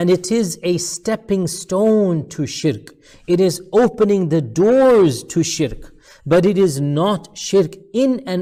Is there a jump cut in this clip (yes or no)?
no